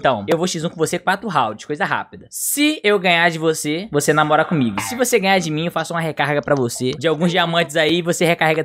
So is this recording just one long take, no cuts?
yes; 0 cuts

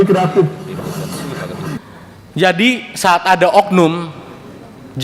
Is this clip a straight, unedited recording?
no; 1 cut; at 1.8 s

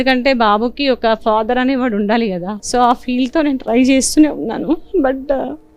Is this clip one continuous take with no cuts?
no; 1 cut; at 2.5 s

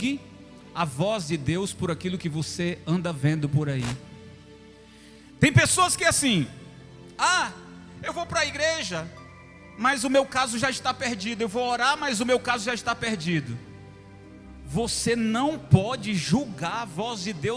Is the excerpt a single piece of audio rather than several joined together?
yes; 0 cuts

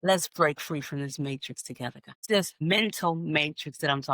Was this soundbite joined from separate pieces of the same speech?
yes; 1 cut; at 2.2 s

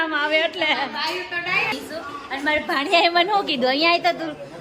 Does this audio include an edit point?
yes; 1 cut; at 1.7 s

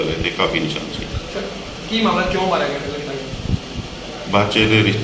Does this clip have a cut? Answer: no; 0 cuts

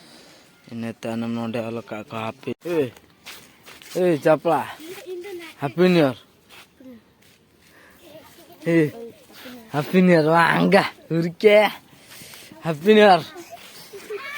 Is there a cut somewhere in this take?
yes; 1 cut; at 2.5 s

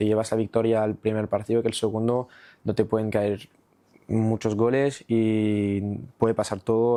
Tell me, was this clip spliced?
no; 0 cuts

